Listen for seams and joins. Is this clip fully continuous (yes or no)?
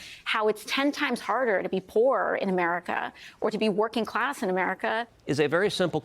no